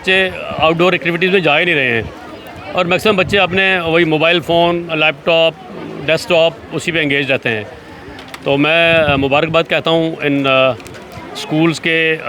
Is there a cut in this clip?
no; 0 cuts

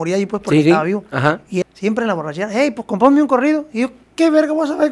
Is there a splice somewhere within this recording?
yes; 1 cut; at 1.6 s

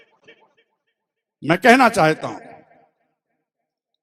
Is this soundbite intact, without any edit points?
yes; 0 cuts

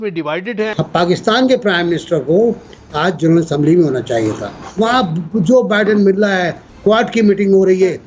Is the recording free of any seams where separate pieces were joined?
no; 2 cuts; at 0.8 s, 4.6 s

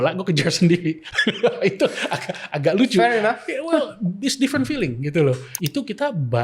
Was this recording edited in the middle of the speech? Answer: yes; 1 cut; at 5.5 s

